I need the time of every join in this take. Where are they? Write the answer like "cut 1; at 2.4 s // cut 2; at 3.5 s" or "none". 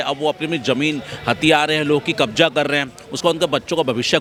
none